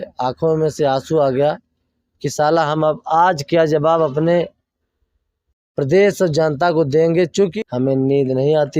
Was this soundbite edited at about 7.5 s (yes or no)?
yes